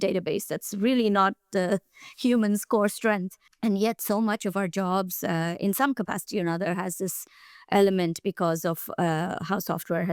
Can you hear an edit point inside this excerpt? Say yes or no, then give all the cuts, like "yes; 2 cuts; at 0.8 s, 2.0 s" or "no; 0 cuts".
no; 0 cuts